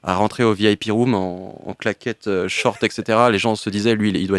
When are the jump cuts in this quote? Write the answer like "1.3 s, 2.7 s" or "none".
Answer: none